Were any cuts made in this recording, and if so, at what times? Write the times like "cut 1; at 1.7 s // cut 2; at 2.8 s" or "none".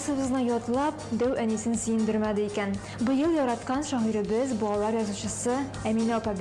cut 1; at 2.8 s